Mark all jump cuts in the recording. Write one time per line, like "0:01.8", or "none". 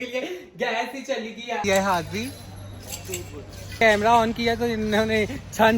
0:01.6
0:03.8